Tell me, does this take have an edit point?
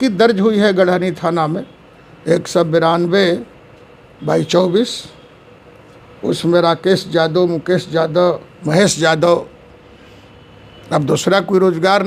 no; 0 cuts

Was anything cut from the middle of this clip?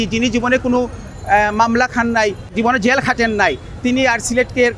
yes; 1 cut; at 2.5 s

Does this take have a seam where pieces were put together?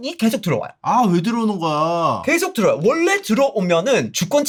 no; 0 cuts

